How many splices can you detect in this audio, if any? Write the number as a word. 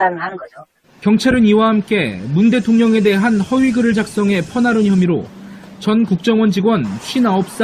zero